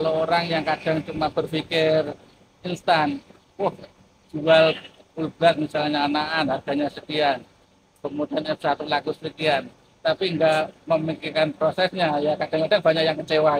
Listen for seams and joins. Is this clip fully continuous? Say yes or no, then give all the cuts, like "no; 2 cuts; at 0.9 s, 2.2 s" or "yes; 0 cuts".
yes; 0 cuts